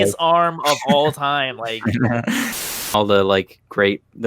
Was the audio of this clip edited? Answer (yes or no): yes